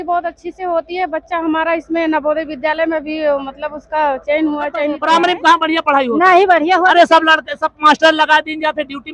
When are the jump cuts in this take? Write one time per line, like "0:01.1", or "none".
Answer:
0:05.0